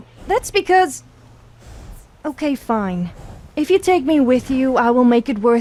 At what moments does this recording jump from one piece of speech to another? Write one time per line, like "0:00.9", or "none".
none